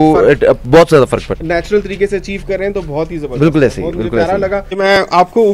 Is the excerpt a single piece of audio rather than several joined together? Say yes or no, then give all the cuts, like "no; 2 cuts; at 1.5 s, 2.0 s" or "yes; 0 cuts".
no; 2 cuts; at 1.3 s, 4.7 s